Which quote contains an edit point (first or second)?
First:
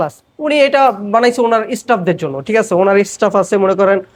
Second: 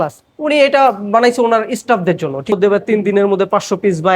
second